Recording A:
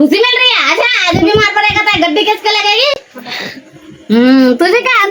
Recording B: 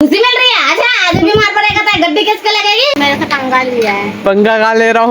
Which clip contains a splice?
B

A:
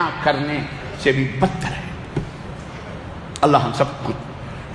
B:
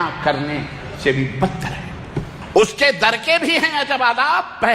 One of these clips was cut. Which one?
B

